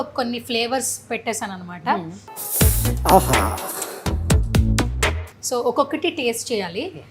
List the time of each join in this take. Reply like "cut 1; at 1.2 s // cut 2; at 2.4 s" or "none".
none